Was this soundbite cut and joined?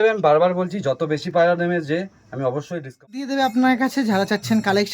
yes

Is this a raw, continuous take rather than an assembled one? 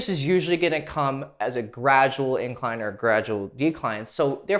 yes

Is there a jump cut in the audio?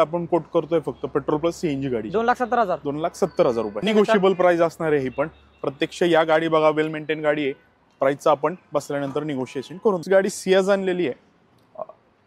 no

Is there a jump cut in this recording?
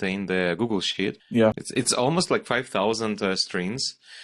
yes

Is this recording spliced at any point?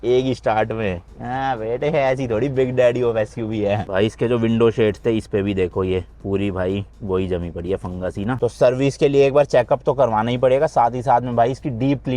no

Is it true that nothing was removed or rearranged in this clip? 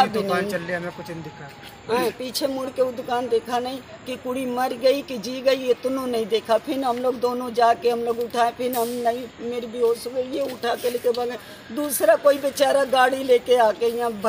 yes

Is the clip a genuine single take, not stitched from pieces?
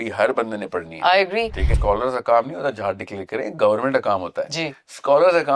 no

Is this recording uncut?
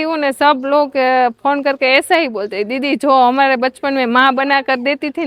yes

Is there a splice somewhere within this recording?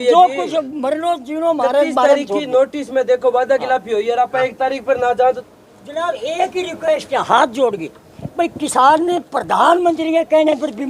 yes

